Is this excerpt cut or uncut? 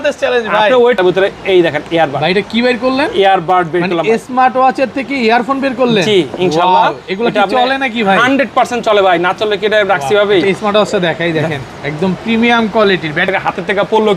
cut